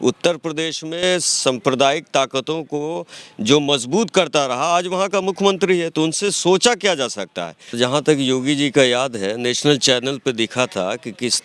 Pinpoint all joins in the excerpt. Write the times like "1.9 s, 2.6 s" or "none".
7.7 s